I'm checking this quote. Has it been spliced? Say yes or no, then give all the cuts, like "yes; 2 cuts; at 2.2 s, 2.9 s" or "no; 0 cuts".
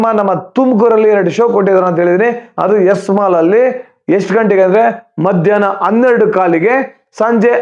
no; 0 cuts